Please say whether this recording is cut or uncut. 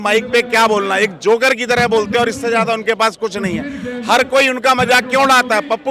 uncut